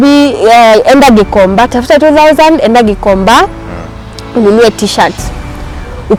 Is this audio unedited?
yes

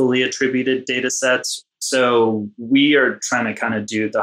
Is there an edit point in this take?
yes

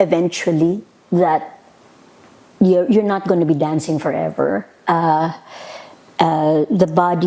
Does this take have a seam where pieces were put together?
no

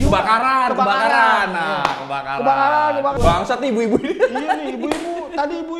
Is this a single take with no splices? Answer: no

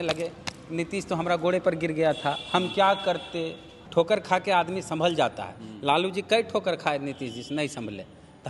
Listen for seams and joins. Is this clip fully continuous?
no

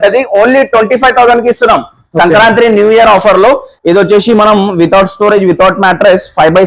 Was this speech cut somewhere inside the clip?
yes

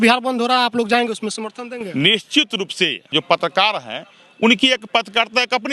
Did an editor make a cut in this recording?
yes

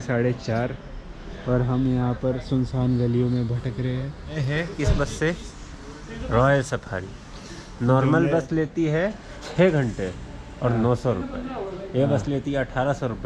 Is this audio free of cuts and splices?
no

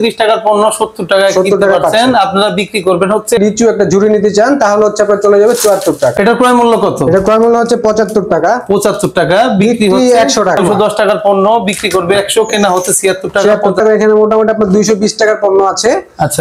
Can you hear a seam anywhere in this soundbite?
yes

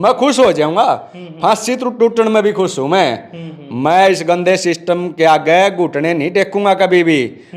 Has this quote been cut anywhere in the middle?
no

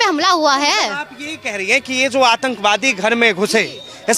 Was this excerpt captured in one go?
yes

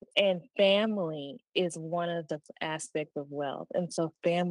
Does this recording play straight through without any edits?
yes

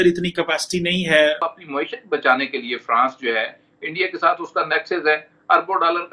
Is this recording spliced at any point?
yes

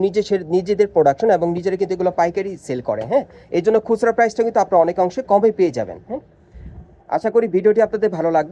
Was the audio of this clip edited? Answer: no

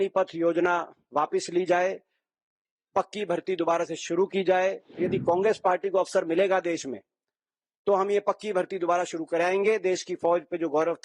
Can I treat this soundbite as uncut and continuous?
no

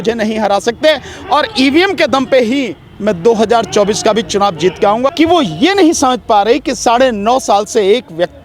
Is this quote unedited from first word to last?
no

